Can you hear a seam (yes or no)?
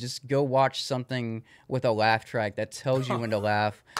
no